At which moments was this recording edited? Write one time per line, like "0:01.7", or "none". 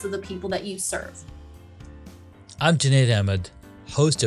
0:01.3
0:02.5